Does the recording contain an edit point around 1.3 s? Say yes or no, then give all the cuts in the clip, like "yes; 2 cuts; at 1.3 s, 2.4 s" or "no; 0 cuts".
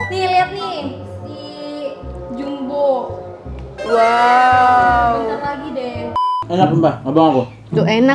no; 1 cut; at 6.4 s